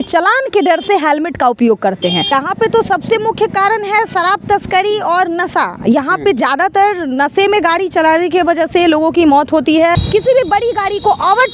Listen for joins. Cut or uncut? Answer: cut